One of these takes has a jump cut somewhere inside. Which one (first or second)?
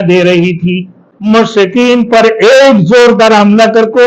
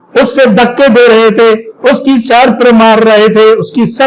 first